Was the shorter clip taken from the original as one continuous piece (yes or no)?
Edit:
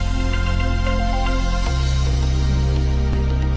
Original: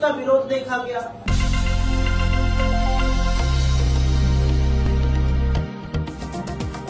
yes